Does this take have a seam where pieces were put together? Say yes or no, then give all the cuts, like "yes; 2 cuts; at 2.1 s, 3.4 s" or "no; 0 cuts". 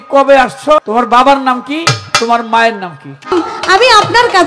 yes; 2 cuts; at 0.8 s, 3.3 s